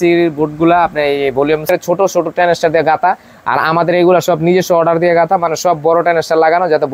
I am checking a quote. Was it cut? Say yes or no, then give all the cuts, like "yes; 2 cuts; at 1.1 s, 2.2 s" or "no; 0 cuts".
yes; 1 cut; at 1.7 s